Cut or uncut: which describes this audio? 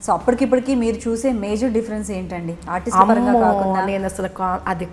uncut